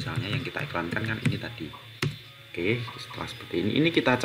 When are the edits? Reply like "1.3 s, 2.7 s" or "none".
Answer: none